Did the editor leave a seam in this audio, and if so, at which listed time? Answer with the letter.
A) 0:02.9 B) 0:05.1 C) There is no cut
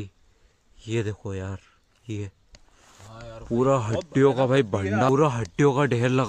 B